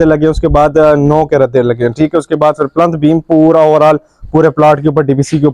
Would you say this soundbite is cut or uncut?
uncut